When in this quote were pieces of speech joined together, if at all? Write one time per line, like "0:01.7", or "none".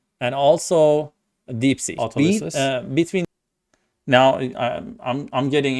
0:03.3